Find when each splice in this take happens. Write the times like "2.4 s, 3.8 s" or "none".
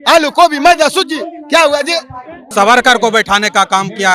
2.4 s